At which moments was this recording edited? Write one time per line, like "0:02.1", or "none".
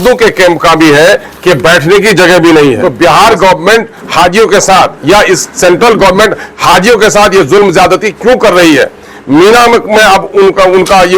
0:02.8